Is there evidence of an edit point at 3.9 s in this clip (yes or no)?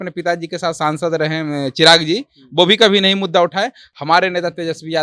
no